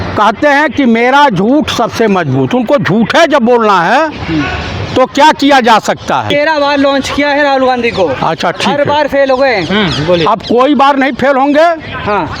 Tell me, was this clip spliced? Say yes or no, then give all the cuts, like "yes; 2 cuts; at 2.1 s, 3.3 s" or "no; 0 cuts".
no; 0 cuts